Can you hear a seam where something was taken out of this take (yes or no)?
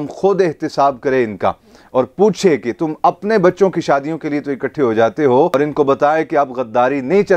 yes